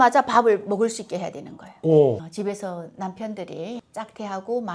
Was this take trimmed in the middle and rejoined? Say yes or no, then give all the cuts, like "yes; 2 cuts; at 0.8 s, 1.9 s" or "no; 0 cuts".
yes; 1 cut; at 2.1 s